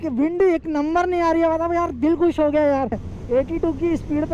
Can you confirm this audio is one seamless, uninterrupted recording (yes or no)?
no